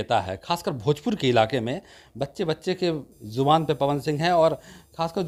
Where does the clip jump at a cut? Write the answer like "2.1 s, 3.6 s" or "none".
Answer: none